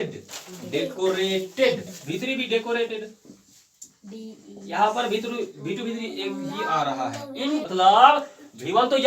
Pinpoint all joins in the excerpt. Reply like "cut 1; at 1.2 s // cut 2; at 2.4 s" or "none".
cut 1; at 7.7 s

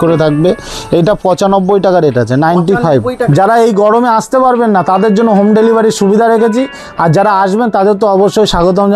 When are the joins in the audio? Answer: cut 1; at 3.2 s

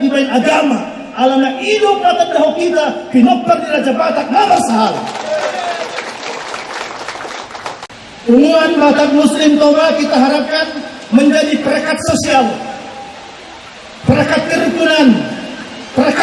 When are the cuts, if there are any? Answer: cut 1; at 7.9 s

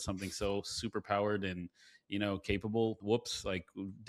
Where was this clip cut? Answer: cut 1; at 3.0 s

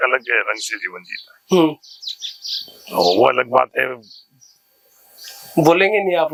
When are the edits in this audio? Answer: none

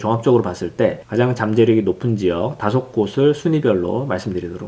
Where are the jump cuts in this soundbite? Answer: none

